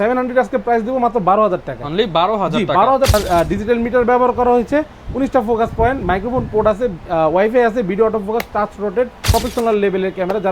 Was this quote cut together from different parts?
yes; 2 cuts; at 3.1 s, 9.3 s

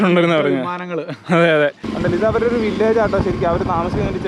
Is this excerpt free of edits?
no; 1 cut; at 1.9 s

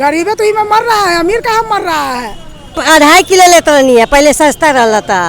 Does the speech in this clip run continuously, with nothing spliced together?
no; 1 cut; at 2.8 s

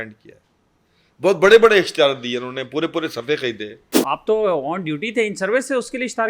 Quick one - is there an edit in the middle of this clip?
yes; 1 cut; at 3.9 s

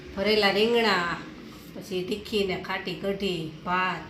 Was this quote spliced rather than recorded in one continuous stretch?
no; 0 cuts

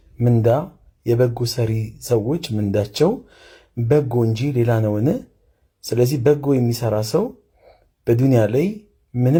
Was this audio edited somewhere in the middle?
no; 0 cuts

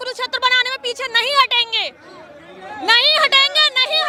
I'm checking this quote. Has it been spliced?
no; 0 cuts

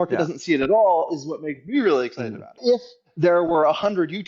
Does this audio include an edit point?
yes; 1 cut; at 2.6 s

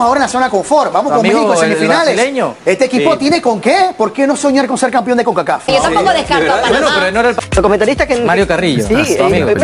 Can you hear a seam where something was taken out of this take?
yes; 2 cuts; at 5.7 s, 7.4 s

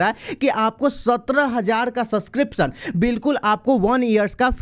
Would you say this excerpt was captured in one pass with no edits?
yes; 0 cuts

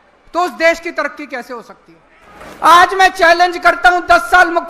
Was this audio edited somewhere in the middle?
yes; 1 cut; at 2.4 s

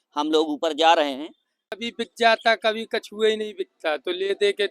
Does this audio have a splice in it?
yes; 1 cut; at 1.8 s

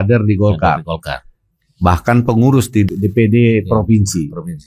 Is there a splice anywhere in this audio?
yes; 1 cut; at 2.9 s

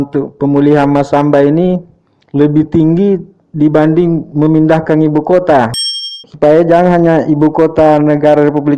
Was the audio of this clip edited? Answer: yes; 1 cut; at 5.8 s

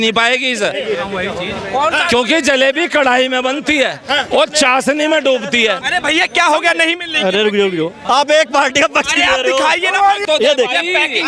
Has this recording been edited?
yes; 3 cuts; at 5.8 s, 8.0 s, 10.2 s

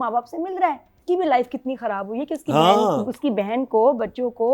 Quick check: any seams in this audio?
yes; 1 cut; at 0.9 s

